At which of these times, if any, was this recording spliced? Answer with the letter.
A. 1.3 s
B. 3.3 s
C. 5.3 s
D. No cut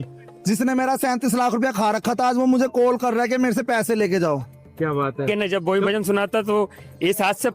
C